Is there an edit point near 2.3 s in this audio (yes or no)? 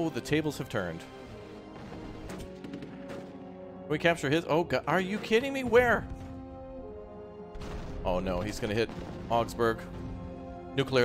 yes